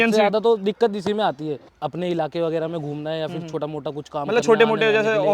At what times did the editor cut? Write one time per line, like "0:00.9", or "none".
0:01.6